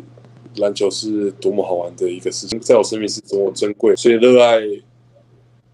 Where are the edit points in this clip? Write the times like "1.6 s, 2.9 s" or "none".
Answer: 2.6 s, 4.0 s